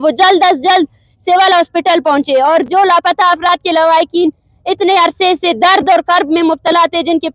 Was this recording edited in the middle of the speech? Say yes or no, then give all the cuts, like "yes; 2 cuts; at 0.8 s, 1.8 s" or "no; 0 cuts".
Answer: no; 0 cuts